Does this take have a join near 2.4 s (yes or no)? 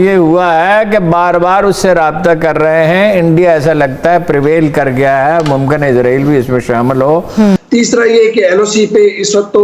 no